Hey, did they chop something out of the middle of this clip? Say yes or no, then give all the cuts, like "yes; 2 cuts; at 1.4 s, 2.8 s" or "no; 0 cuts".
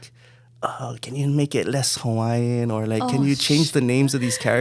no; 0 cuts